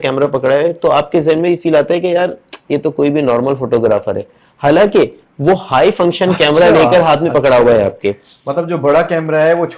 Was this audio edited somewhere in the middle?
no; 0 cuts

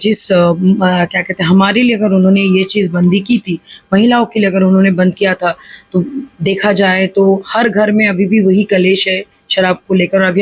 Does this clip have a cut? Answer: no; 0 cuts

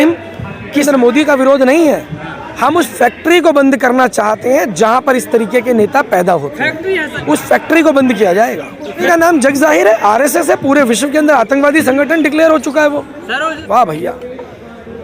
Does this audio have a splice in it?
yes; 4 cuts; at 0.9 s, 7.1 s, 9.0 s, 13.6 s

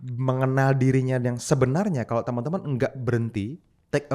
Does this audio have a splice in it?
no; 0 cuts

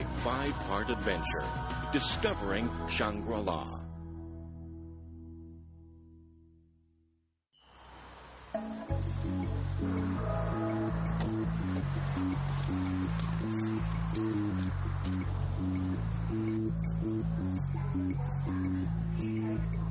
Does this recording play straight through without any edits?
yes; 0 cuts

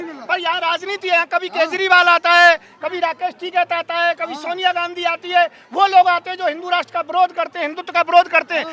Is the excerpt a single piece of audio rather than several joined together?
yes; 0 cuts

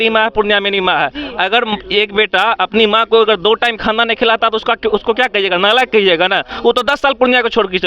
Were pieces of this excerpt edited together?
no; 0 cuts

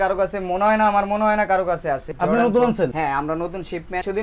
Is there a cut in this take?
no; 0 cuts

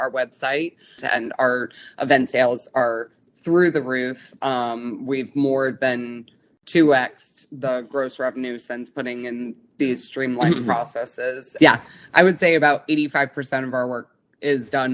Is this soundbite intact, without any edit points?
no; 2 cuts; at 1.0 s, 11.4 s

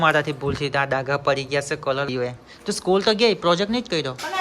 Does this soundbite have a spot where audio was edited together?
yes; 1 cut; at 2.1 s

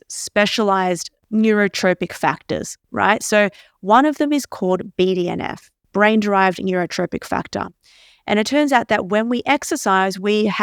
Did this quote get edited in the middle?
yes; 2 cuts; at 1.1 s, 5.9 s

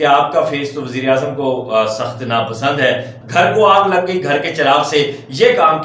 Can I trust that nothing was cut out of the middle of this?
no; 1 cut; at 3.2 s

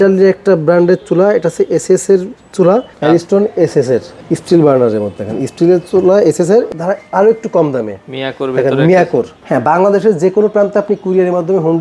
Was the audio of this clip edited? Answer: yes; 4 cuts; at 2.9 s, 4.1 s, 6.7 s, 9.4 s

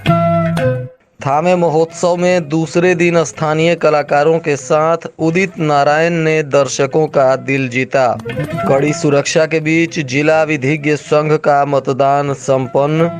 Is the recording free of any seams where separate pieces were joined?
no; 1 cut; at 0.9 s

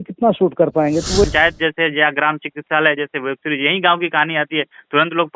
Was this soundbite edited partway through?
yes; 1 cut; at 1.2 s

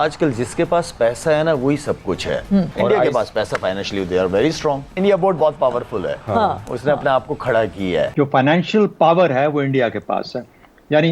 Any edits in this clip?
yes; 3 cuts; at 2.7 s, 4.9 s, 8.1 s

